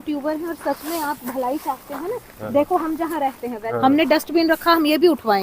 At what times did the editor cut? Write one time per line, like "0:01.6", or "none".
0:03.6